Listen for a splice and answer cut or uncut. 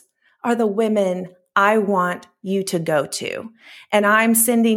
uncut